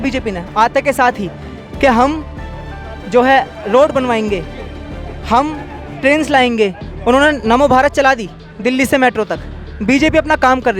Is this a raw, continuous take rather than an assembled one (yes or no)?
yes